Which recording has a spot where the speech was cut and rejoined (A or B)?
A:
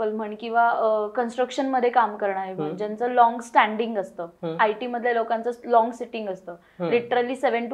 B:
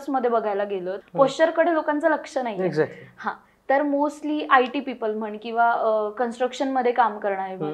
B